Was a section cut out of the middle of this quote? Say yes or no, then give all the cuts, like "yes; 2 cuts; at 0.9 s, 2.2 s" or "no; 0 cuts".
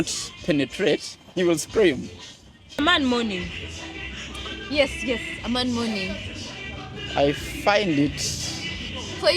yes; 1 cut; at 2.8 s